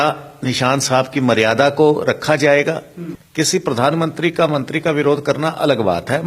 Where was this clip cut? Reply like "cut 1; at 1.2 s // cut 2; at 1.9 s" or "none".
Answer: cut 1; at 3.2 s